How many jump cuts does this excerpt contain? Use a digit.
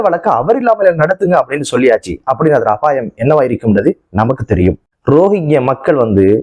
1